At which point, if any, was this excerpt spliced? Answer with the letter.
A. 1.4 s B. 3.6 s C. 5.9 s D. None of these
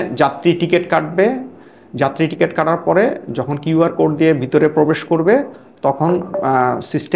D